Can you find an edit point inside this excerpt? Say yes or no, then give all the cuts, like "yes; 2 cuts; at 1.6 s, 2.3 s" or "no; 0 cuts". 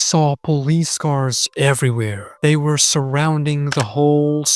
no; 0 cuts